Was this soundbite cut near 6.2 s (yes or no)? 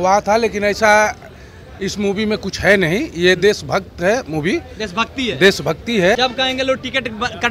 yes